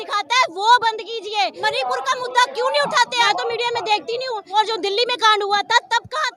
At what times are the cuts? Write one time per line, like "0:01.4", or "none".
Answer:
0:01.6
0:03.3
0:04.4